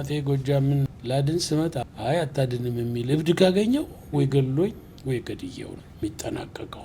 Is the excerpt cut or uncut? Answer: cut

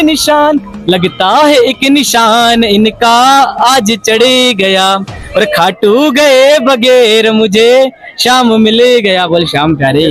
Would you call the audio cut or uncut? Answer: uncut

